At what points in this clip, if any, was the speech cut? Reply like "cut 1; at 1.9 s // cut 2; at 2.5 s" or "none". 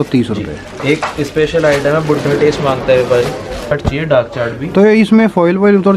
cut 1; at 3.7 s